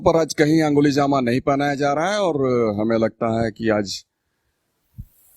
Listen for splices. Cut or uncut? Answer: uncut